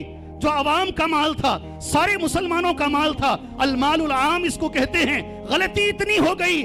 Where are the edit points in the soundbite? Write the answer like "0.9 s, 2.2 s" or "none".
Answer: none